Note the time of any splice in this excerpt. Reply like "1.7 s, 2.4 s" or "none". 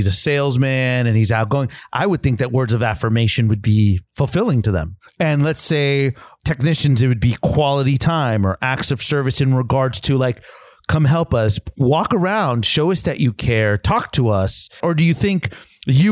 4.1 s, 4.9 s, 14.8 s